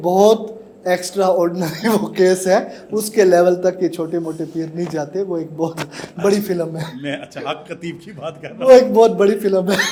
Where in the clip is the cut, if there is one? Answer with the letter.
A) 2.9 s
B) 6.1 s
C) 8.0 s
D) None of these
D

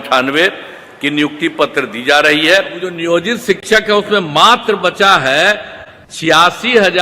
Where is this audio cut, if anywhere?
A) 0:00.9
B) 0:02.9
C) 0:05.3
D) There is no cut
B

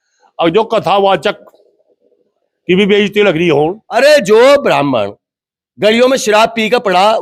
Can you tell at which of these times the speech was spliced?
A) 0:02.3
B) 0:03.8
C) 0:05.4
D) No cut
B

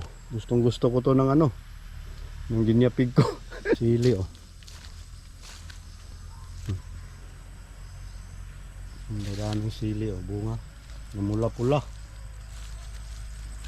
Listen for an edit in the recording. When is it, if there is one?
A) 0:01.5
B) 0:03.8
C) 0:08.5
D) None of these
B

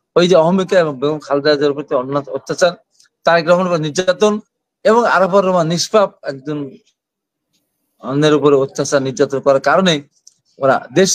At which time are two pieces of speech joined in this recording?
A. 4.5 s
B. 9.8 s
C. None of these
C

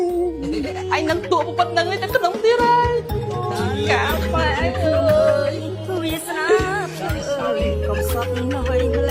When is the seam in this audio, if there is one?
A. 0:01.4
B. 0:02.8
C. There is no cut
C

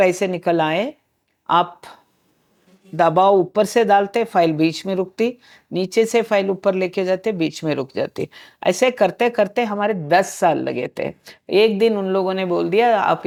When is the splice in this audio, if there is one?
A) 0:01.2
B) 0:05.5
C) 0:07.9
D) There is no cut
D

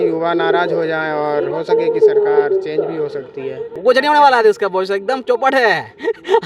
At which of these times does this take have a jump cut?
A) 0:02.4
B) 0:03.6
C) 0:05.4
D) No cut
B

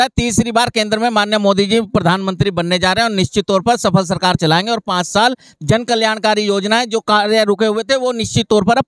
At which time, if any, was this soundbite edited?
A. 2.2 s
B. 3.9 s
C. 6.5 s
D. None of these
D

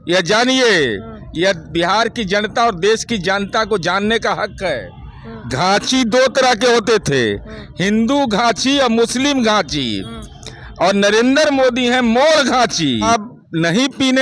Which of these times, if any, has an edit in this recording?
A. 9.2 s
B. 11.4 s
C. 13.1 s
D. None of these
C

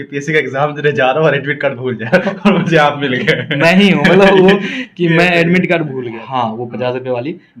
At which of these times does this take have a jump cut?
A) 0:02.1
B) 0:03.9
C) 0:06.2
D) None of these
C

